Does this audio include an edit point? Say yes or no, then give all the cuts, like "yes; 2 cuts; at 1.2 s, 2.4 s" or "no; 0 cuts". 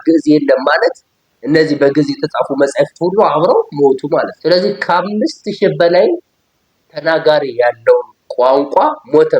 yes; 1 cut; at 4.3 s